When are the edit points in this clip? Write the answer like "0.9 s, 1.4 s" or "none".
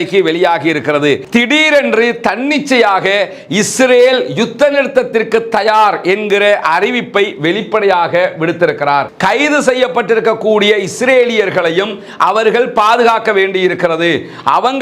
1.2 s, 9.1 s